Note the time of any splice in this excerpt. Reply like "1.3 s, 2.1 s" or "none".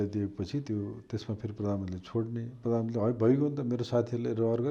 none